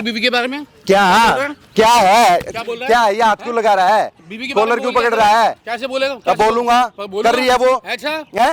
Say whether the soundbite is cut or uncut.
uncut